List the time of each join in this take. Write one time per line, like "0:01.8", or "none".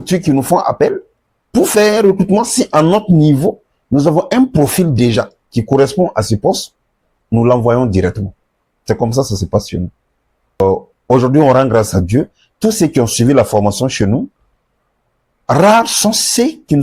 0:10.6